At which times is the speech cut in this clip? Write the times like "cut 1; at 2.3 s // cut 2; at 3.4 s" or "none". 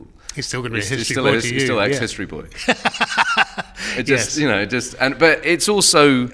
none